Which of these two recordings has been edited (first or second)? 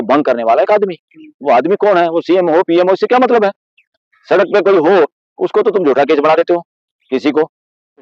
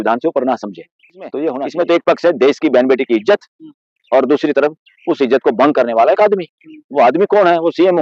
second